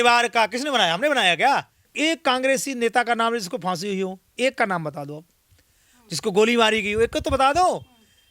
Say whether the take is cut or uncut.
cut